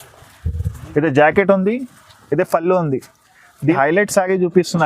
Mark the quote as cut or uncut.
cut